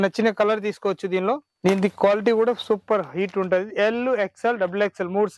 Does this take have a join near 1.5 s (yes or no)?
yes